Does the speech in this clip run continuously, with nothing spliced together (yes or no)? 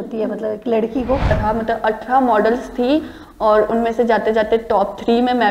no